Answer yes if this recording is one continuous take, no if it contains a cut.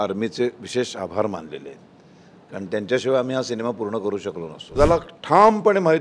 no